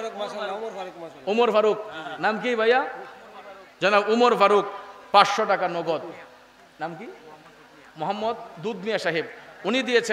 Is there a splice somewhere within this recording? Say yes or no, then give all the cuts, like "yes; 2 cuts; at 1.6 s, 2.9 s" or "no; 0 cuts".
no; 0 cuts